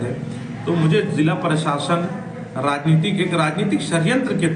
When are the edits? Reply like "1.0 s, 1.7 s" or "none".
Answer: none